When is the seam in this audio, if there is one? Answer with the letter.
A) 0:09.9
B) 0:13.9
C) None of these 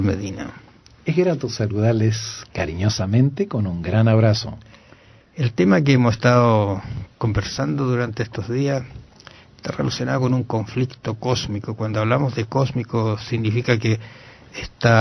A